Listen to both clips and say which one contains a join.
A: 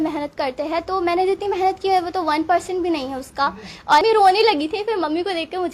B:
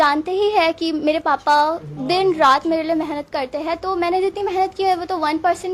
A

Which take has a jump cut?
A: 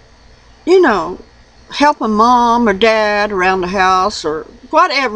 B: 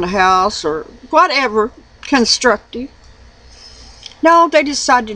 A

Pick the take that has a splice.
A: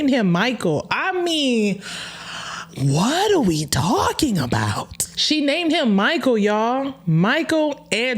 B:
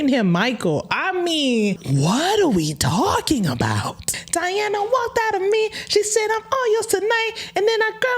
B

